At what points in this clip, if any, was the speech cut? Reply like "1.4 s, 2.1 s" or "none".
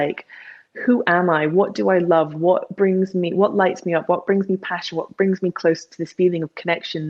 none